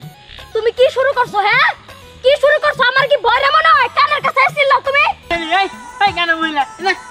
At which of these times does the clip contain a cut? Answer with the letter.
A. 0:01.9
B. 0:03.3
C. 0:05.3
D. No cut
C